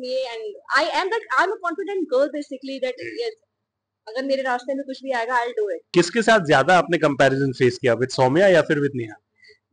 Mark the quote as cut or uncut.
cut